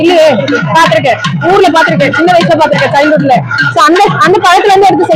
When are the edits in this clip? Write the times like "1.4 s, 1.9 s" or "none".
none